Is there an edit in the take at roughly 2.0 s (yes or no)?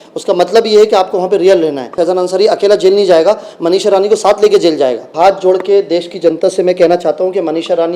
yes